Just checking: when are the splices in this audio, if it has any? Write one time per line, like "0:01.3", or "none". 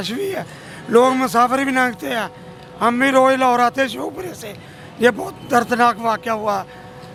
none